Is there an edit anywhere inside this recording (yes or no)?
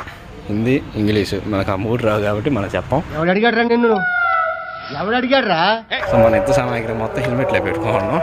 yes